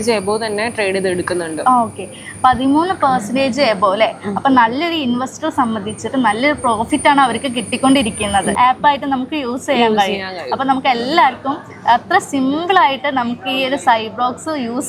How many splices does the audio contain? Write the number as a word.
one